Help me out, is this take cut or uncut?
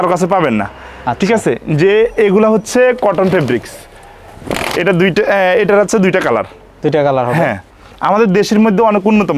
uncut